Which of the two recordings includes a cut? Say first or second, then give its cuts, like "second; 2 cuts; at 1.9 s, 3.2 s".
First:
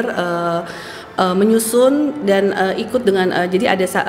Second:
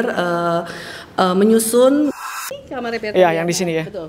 second; 1 cut; at 2.2 s